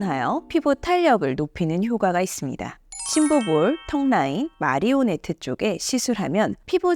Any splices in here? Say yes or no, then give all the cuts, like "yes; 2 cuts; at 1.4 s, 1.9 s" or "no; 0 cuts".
no; 0 cuts